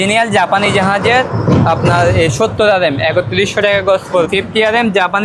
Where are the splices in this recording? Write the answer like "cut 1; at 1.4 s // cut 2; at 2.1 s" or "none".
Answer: cut 1; at 4.3 s